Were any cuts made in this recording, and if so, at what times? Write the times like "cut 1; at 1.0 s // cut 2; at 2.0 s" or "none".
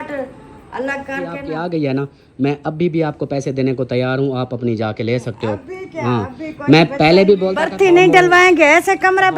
cut 1; at 1.4 s // cut 2; at 7.6 s